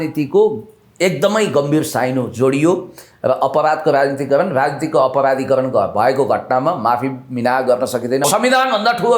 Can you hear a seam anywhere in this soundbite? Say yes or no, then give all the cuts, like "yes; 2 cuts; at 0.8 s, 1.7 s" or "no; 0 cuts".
yes; 1 cut; at 8.3 s